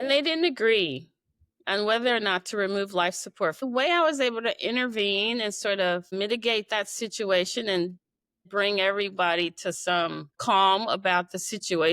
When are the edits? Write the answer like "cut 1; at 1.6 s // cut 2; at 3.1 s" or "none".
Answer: cut 1; at 3.6 s // cut 2; at 10.4 s